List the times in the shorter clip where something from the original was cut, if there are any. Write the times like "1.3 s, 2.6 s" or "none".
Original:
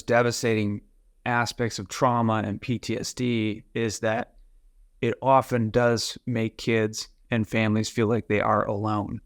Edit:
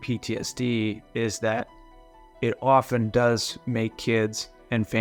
none